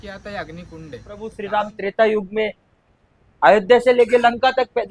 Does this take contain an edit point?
yes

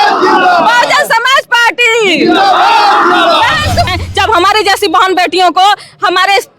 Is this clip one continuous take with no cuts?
no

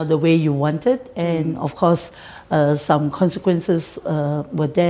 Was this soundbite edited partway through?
no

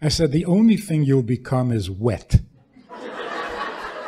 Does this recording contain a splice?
no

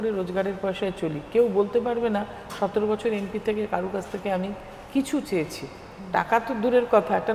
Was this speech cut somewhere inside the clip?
no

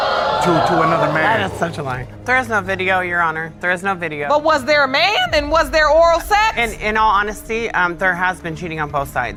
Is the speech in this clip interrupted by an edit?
no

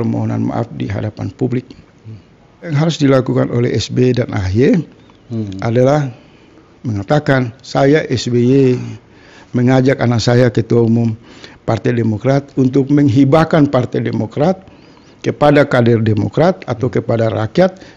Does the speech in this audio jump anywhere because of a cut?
yes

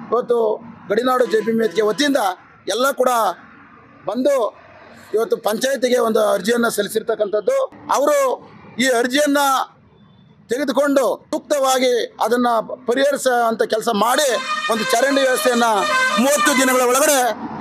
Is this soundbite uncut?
no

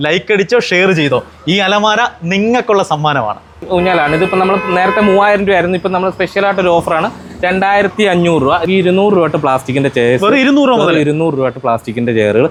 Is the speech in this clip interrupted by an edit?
no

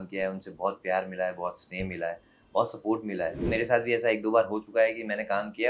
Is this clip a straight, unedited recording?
no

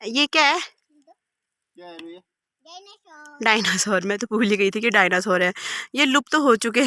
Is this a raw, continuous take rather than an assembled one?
yes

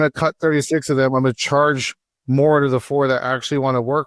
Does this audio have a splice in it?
no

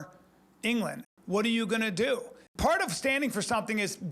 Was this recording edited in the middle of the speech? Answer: yes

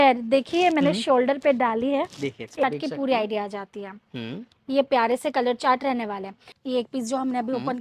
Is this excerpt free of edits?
no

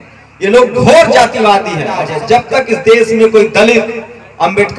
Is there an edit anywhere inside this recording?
yes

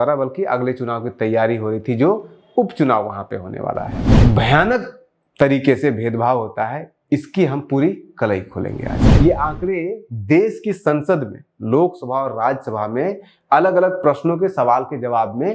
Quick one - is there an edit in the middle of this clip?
yes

